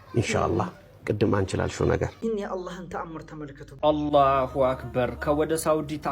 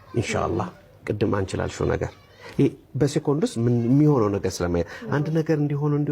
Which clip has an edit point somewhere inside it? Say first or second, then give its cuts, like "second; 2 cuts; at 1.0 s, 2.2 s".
first; 2 cuts; at 2.1 s, 3.6 s